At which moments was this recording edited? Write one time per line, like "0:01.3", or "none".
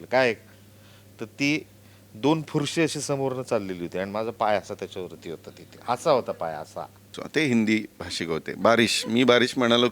0:07.2